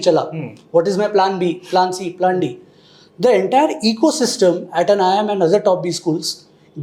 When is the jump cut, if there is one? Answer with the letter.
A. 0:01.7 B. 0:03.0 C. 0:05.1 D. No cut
D